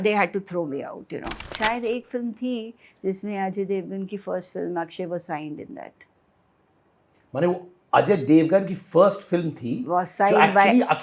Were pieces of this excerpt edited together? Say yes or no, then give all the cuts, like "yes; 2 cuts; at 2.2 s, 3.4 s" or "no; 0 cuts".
yes; 1 cut; at 1.4 s